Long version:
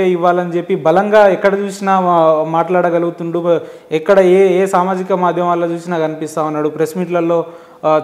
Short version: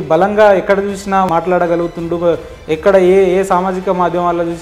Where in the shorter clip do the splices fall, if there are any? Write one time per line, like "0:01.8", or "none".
0:01.3